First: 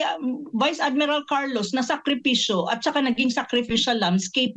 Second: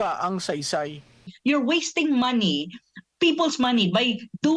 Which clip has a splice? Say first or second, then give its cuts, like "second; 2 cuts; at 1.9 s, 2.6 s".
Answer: second; 1 cut; at 1.3 s